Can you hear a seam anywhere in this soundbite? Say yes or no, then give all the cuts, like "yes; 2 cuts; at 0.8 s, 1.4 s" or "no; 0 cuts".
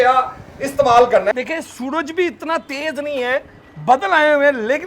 yes; 1 cut; at 1.3 s